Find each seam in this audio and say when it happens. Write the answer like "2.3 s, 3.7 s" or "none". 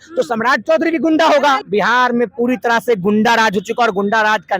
1.6 s